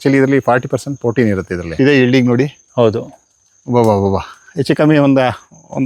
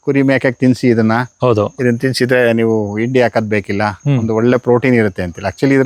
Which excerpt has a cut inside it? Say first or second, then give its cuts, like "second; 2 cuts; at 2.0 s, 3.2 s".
first; 1 cut; at 1.7 s